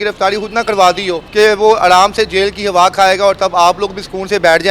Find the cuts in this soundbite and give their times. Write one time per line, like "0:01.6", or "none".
0:01.2